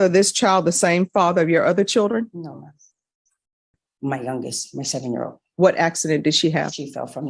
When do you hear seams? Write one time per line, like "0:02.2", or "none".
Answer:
0:03.8